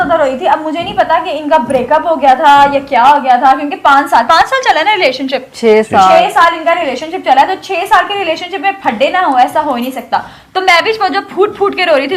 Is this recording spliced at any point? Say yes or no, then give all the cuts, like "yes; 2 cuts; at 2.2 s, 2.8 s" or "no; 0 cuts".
no; 0 cuts